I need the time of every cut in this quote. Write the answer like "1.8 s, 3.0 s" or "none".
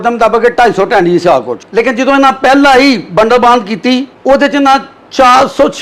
1.6 s, 4.1 s